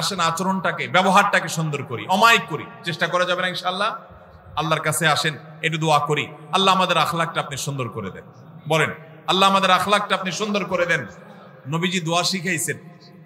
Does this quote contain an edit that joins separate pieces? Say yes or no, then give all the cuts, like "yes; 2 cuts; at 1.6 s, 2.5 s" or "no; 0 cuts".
no; 0 cuts